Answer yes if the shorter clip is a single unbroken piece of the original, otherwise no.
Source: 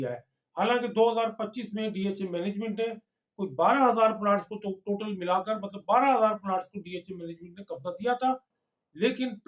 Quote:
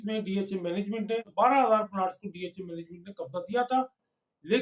no